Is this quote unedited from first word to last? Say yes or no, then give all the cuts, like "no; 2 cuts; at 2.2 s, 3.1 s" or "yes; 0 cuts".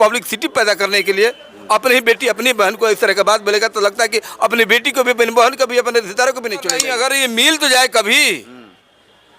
no; 1 cut; at 6.8 s